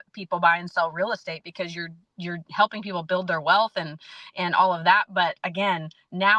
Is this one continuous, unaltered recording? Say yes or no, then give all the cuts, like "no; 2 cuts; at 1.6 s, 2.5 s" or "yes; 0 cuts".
yes; 0 cuts